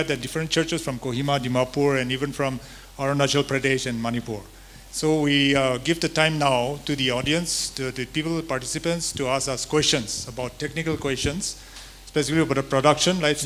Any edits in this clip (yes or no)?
no